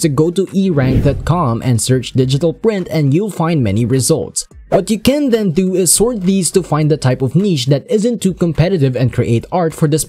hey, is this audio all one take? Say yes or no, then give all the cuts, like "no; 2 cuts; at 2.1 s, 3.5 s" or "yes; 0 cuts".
yes; 0 cuts